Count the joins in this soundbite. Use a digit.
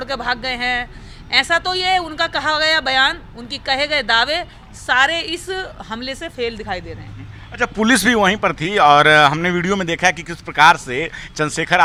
0